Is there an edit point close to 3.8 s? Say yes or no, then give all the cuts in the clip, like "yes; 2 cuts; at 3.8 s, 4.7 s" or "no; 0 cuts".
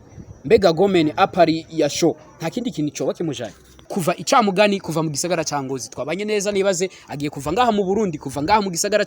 yes; 1 cut; at 3.8 s